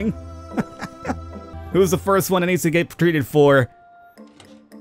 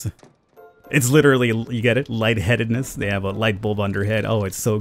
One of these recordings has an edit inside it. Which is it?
first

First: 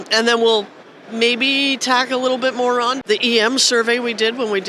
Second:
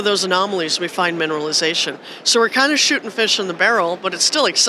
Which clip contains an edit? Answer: first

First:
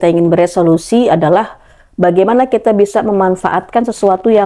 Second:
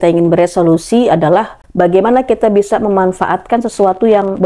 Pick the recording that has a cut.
second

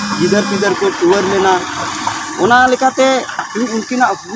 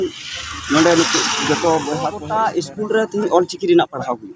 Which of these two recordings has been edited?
second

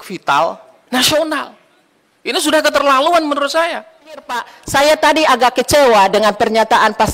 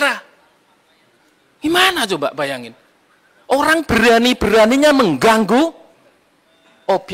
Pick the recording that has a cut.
first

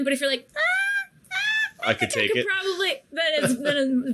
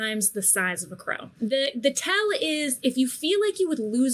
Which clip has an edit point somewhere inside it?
second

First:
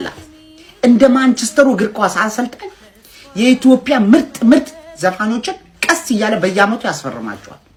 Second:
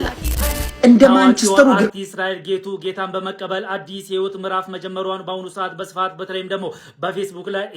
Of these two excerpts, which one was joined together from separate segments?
second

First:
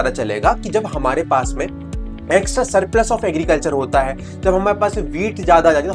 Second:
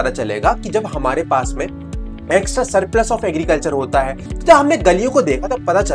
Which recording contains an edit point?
second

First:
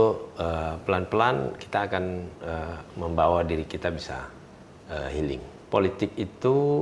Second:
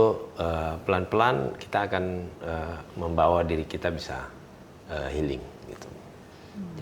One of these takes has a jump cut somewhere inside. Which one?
first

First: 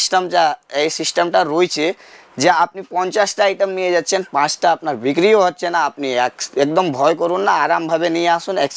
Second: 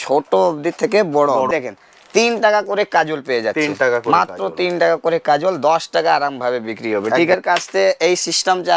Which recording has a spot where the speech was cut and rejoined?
second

